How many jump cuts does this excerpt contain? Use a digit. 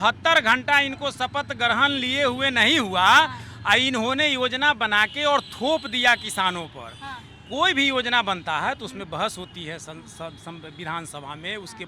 0